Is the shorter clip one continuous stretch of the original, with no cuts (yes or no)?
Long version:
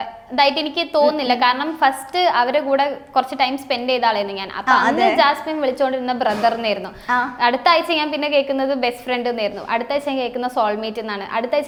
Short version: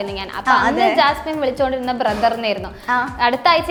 yes